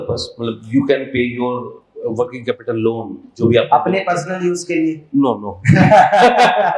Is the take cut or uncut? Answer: uncut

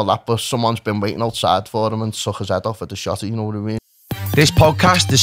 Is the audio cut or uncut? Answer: cut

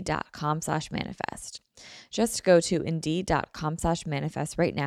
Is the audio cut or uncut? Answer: uncut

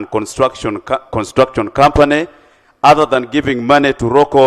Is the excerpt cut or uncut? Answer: uncut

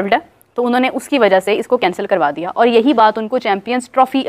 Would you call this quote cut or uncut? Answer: uncut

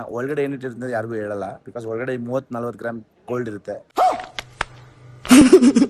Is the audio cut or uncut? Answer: uncut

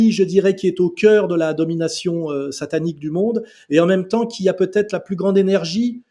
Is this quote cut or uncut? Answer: uncut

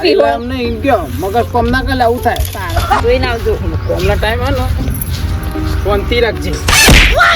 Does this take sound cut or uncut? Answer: cut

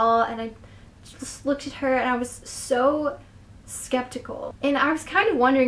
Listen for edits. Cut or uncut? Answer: cut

